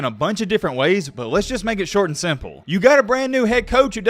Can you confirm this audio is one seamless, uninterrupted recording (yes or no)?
yes